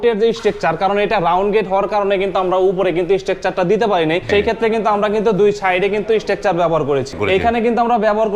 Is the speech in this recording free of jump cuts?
no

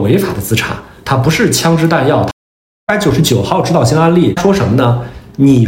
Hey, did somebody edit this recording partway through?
yes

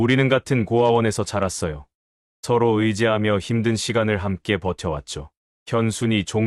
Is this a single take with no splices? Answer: yes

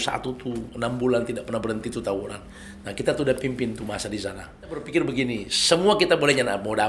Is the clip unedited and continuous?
no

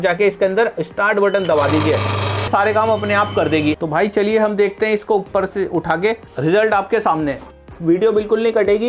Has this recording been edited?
yes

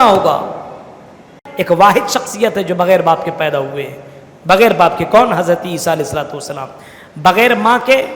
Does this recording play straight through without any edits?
no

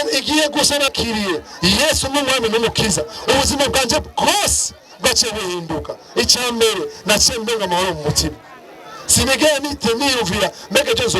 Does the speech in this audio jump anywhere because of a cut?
yes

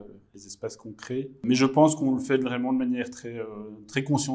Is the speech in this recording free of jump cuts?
yes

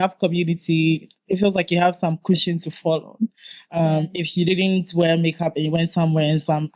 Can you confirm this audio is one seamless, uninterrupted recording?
yes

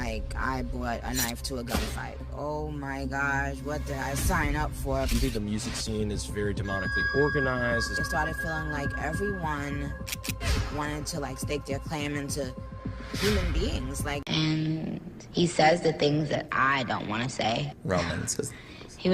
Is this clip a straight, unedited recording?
no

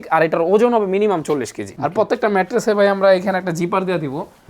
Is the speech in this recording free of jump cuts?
no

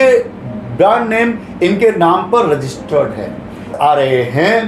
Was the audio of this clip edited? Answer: yes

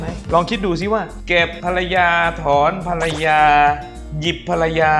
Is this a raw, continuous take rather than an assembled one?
yes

